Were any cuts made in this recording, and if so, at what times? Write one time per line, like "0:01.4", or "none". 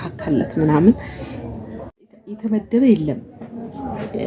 0:02.1